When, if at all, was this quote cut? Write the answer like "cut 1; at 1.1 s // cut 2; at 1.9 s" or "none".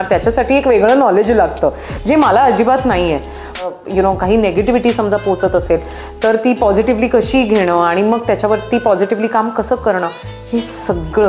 cut 1; at 3.7 s